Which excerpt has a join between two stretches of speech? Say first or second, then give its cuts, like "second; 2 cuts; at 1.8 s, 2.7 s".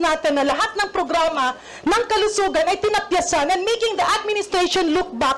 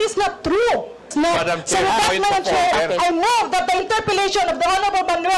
second; 1 cut; at 1.1 s